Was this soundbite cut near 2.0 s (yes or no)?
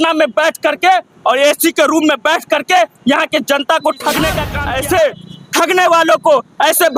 no